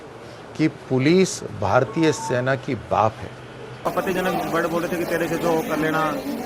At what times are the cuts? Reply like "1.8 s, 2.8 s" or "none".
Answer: 3.9 s